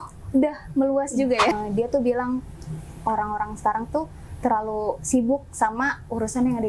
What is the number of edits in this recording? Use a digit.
1